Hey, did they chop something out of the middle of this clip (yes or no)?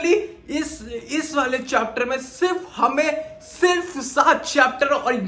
no